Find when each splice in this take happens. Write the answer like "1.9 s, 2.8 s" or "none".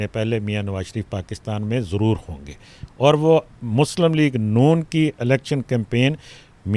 none

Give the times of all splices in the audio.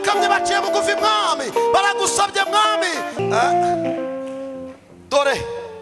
3.2 s

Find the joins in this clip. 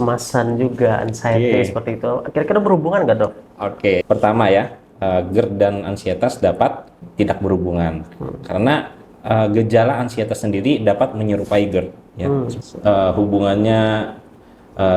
4.0 s, 7.0 s, 12.6 s

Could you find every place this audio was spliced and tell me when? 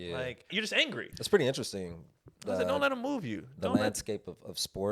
0.9 s

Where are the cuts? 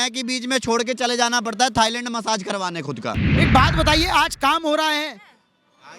3.3 s

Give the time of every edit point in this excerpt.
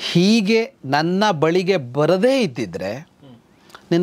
none

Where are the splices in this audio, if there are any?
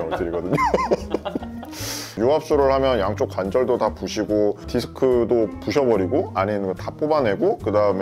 none

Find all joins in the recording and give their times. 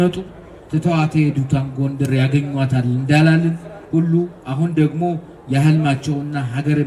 none

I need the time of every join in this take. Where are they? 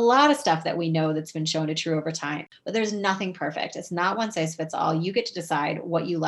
2.5 s

